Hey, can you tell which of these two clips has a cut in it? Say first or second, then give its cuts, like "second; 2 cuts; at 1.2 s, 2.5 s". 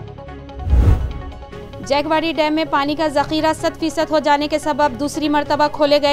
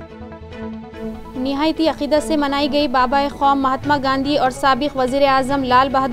first; 1 cut; at 1.2 s